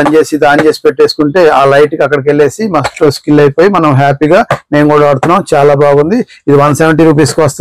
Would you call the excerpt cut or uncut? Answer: uncut